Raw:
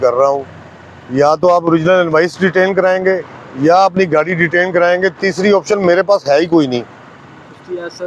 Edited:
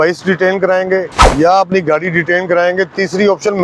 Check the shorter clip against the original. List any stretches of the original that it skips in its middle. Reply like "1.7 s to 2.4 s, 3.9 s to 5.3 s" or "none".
3.3 s to 3.4 s

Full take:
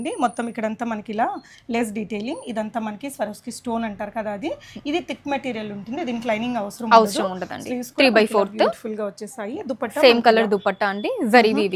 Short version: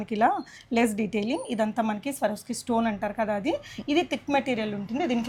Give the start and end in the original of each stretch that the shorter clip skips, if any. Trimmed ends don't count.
none

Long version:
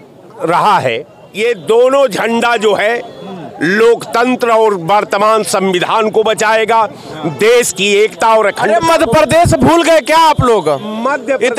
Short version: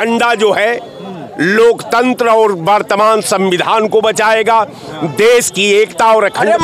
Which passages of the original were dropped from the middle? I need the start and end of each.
none

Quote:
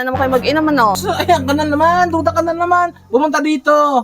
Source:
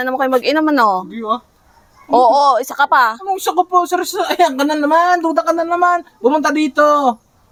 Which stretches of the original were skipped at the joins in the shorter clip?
1.0 s to 4.1 s

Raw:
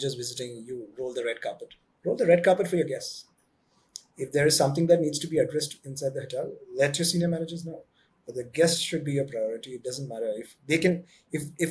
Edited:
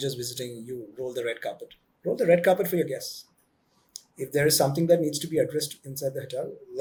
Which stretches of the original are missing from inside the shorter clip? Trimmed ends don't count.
none

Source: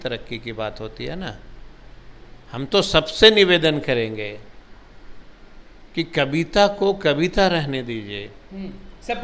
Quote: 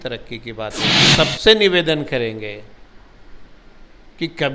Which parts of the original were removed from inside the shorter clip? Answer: 1.1 s to 2.9 s

